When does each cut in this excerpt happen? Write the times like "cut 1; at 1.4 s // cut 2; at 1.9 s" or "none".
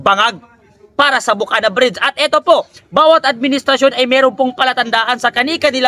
none